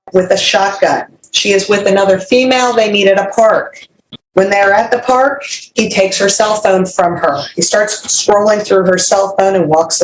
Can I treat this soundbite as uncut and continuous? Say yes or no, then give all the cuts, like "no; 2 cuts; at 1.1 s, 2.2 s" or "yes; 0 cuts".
yes; 0 cuts